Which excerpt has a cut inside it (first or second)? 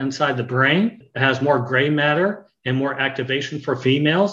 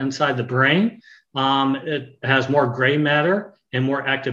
first